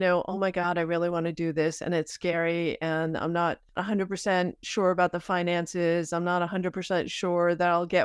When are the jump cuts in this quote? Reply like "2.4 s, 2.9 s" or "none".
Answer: 3.8 s